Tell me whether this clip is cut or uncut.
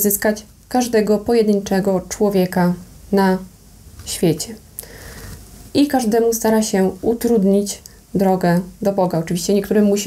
uncut